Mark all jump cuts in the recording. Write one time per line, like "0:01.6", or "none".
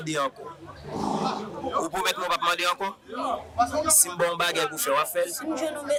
none